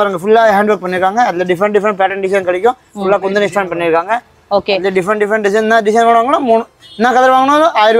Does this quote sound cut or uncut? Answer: uncut